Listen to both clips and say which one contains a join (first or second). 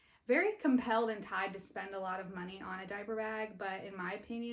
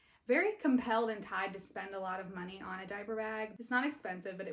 second